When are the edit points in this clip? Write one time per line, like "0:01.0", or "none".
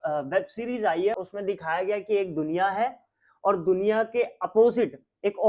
0:01.1